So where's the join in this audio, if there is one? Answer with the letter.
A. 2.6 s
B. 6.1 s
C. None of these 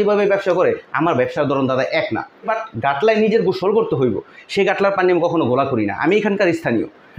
A